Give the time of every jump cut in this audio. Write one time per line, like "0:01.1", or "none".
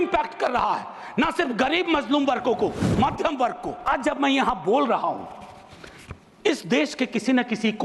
0:03.9